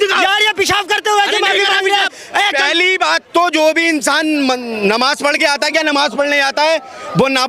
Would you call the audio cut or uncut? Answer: uncut